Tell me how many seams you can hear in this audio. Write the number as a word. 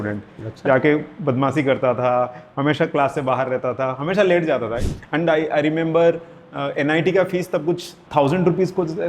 two